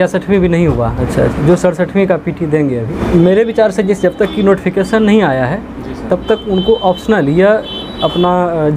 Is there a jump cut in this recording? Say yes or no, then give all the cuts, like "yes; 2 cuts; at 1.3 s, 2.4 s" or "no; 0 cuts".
yes; 2 cuts; at 1.0 s, 2.9 s